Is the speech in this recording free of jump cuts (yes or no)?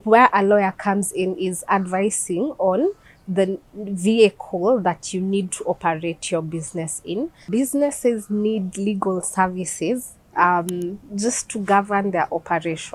no